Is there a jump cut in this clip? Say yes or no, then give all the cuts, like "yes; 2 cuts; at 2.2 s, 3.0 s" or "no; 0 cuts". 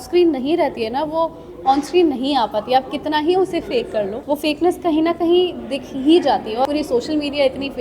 yes; 2 cuts; at 4.2 s, 6.7 s